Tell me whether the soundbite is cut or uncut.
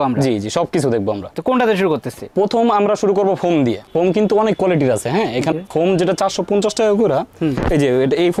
uncut